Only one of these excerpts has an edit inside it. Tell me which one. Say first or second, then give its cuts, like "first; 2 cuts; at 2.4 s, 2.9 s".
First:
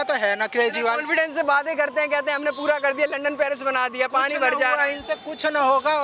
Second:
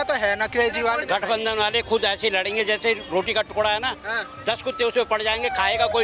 second; 1 cut; at 1.0 s